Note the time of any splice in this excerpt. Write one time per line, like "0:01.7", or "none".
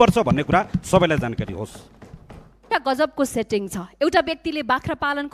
0:02.7